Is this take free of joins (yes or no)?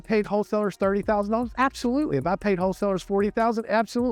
yes